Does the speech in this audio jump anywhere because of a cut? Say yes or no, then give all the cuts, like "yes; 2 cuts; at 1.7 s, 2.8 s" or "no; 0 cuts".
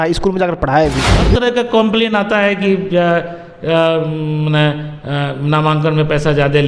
yes; 1 cut; at 1.2 s